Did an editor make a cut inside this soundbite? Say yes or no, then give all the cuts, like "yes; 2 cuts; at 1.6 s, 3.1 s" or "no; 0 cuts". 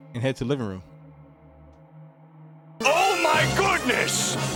no; 0 cuts